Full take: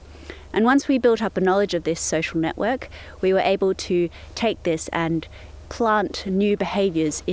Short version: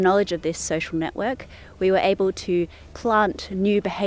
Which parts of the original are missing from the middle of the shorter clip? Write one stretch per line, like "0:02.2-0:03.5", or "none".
0:04.2-0:05.6

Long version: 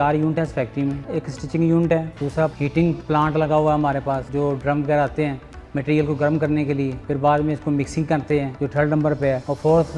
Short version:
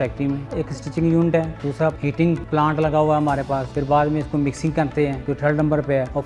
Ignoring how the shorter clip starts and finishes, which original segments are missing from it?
0:04.2-0:07.0

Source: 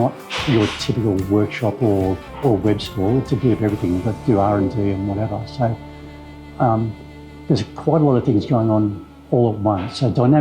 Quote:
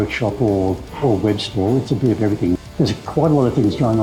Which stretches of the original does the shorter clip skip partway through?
0:04.0-0:07.3

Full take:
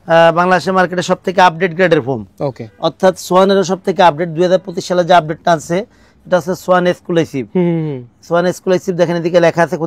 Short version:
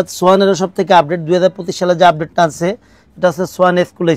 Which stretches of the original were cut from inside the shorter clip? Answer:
none

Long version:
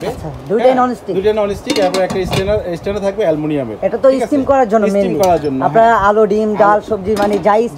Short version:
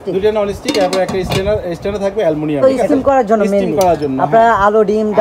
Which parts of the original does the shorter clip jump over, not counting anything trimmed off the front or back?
0:03.6-0:04.1

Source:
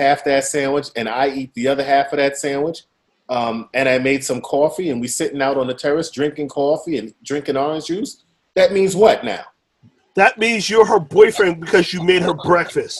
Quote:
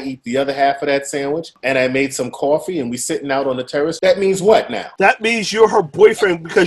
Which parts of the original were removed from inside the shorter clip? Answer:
0:02.8-0:03.6
0:06.1-0:08.5
0:09.3-0:10.0

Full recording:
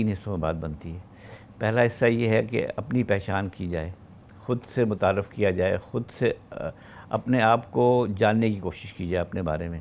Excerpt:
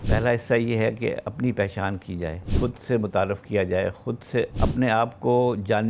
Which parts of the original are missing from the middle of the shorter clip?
0:04.0-0:04.3
0:06.4-0:07.0

